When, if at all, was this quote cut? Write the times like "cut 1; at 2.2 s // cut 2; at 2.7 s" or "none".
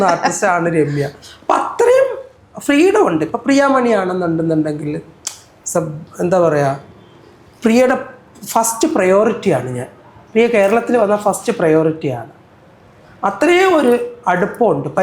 none